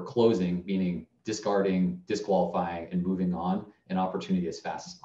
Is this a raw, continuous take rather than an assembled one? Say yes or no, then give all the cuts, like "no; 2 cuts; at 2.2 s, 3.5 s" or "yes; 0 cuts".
yes; 0 cuts